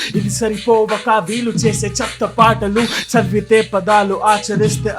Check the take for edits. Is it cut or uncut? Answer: cut